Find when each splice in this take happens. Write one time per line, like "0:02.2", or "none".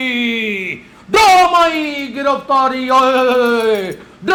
none